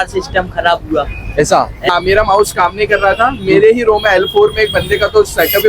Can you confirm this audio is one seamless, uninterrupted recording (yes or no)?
no